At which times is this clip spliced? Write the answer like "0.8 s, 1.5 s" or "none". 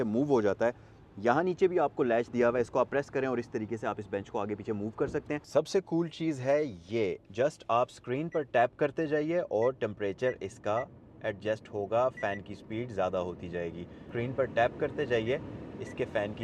5.4 s, 7.2 s, 14.0 s

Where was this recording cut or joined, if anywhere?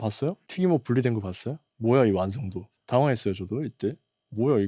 none

